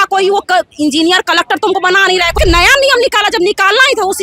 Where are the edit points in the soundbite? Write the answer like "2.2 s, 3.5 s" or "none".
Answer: 2.4 s